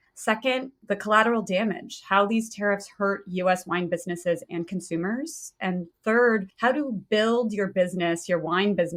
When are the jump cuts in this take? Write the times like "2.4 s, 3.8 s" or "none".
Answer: none